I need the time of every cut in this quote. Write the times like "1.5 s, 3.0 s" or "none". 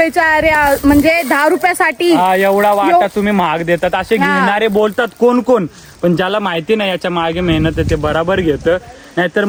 none